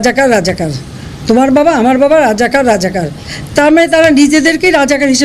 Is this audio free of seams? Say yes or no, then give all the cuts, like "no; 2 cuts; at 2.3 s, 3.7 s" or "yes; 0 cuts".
yes; 0 cuts